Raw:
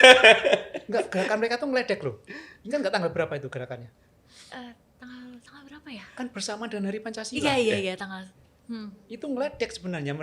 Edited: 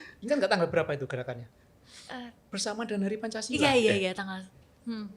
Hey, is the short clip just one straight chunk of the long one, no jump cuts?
no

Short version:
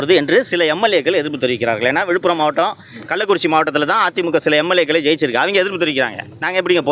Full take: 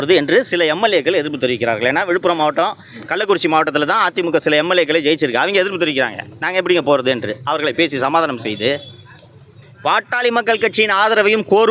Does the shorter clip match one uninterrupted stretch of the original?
yes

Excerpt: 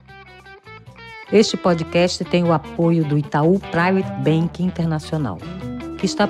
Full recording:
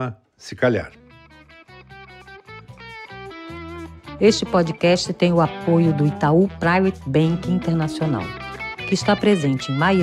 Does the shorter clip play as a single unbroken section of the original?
no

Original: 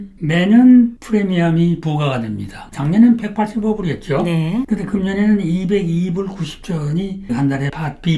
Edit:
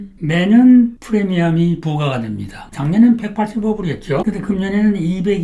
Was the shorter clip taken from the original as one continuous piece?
no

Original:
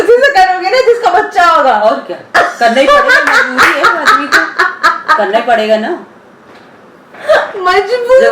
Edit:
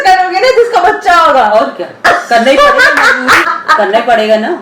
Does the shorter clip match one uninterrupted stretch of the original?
no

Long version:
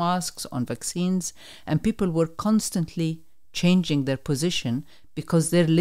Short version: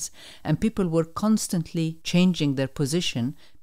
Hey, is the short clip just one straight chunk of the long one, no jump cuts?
no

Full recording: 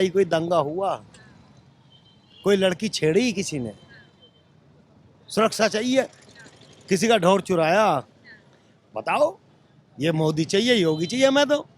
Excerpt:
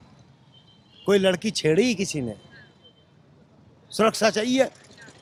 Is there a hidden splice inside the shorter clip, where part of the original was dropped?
no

